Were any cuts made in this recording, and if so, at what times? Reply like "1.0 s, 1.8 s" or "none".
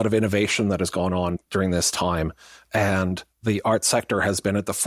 1.4 s